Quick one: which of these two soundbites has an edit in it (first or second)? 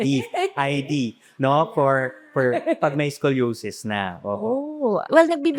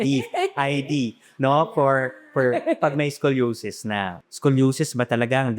second